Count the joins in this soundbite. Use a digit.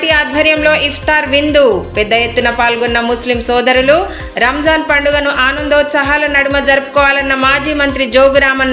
0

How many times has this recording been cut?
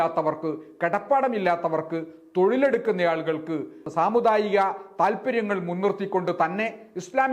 1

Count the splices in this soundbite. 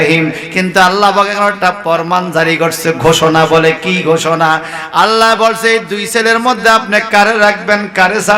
0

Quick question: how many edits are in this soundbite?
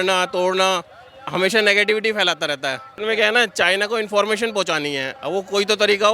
1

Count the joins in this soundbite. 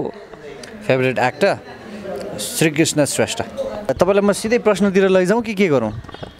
1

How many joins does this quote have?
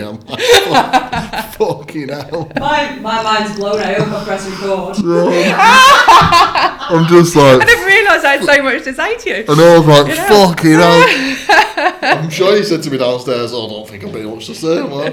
0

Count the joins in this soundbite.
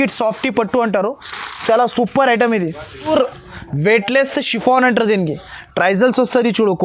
1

